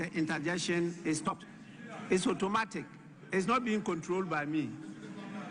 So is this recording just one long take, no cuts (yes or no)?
no